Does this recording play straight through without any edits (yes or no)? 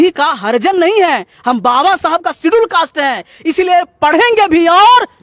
yes